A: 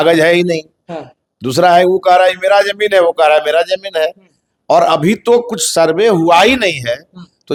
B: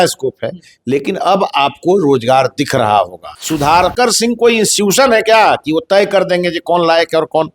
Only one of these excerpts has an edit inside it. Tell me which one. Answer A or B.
B